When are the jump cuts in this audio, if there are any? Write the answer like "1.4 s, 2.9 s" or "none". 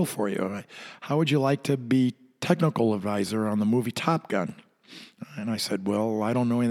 none